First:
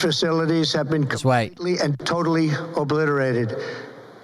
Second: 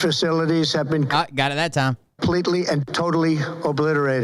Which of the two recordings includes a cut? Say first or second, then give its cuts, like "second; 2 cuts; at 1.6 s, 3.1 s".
first; 1 cut; at 1.6 s